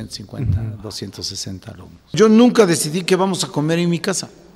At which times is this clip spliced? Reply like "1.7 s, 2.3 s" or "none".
2.1 s